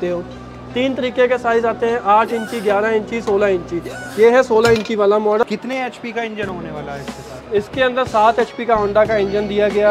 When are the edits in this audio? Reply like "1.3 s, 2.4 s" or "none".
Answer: 5.4 s